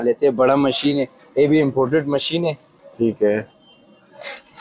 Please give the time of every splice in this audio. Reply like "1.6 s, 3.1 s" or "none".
none